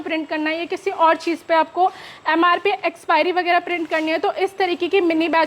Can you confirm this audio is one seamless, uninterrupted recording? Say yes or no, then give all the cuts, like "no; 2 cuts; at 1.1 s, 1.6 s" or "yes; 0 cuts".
yes; 0 cuts